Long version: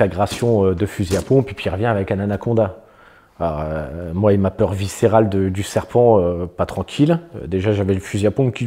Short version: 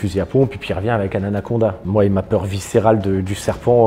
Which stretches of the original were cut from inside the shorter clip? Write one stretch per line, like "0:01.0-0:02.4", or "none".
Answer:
0:02.8-0:04.1

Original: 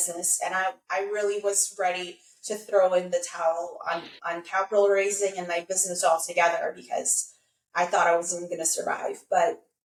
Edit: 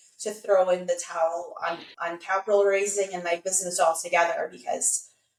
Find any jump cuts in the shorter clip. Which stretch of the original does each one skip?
none

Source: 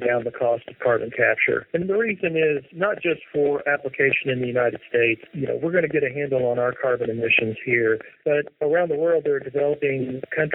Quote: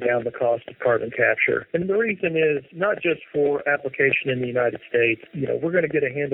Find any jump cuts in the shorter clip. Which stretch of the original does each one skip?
none

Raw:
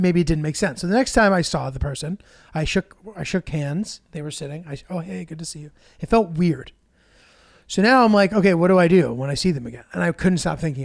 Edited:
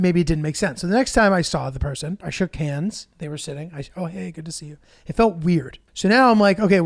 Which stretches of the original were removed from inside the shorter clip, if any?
0:02.3-0:03.2
0:06.7-0:07.5

